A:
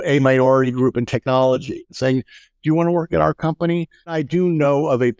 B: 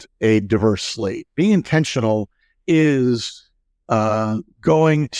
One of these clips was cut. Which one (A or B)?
A